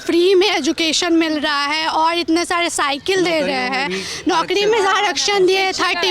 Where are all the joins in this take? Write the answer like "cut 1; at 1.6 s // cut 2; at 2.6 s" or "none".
none